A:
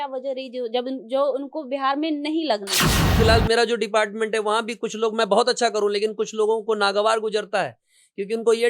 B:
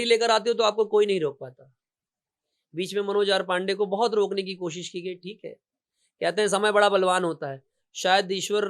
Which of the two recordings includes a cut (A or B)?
A